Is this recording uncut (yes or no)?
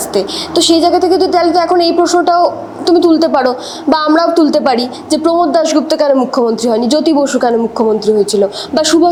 yes